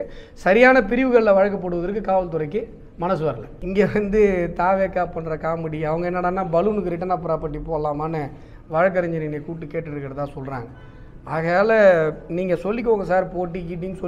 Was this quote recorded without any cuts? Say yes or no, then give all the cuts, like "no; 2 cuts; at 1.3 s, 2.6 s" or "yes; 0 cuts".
no; 1 cut; at 3.5 s